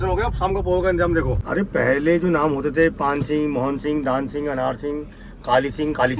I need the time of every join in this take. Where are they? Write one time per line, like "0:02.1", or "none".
0:01.4